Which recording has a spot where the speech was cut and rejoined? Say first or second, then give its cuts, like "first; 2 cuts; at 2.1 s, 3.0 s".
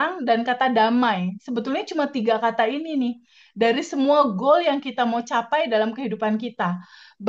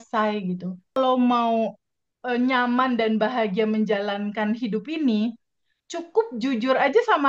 second; 1 cut; at 0.9 s